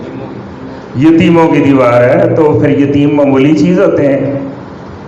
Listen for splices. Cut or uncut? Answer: uncut